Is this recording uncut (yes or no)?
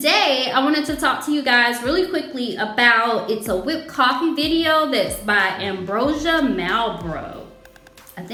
yes